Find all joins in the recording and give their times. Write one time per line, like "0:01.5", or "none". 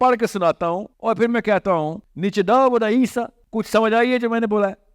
0:00.9
0:02.0
0:03.4